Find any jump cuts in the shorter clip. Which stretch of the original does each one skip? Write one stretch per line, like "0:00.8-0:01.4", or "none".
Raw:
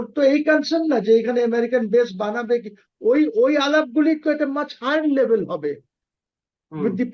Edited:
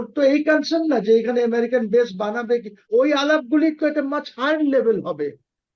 0:02.9-0:03.3